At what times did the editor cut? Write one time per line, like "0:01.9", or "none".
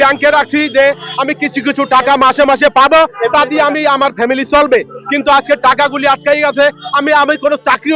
none